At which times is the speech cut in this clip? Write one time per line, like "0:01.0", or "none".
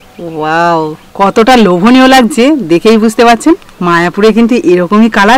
0:01.0
0:03.7